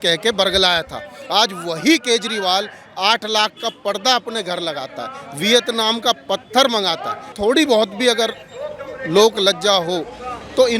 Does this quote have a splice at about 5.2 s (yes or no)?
no